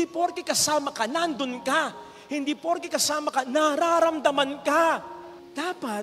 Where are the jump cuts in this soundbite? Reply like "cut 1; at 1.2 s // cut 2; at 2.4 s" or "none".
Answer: none